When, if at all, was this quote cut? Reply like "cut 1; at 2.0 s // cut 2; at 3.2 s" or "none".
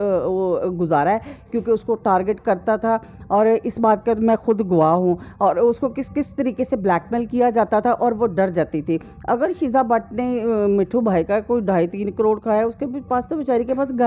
none